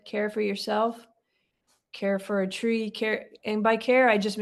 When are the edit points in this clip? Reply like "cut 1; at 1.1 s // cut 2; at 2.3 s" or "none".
none